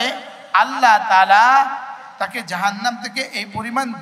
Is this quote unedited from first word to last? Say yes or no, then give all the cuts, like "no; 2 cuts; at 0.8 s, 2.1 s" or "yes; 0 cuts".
no; 1 cut; at 2.0 s